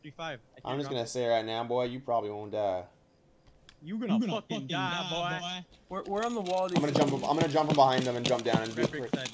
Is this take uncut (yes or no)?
yes